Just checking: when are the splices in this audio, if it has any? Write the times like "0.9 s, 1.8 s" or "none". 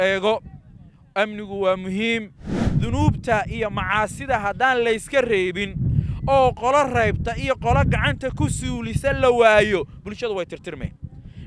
2.7 s